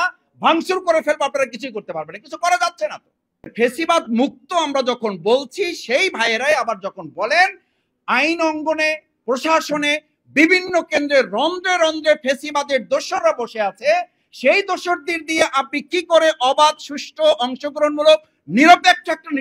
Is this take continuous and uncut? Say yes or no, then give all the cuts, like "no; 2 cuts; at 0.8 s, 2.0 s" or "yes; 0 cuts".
no; 1 cut; at 3.5 s